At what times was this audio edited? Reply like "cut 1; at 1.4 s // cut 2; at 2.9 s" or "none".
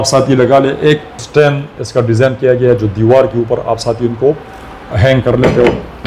cut 1; at 1.2 s